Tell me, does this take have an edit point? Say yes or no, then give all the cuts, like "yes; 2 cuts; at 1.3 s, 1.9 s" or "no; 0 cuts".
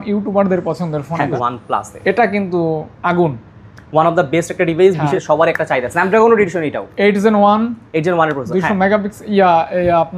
yes; 2 cuts; at 1.3 s, 5.0 s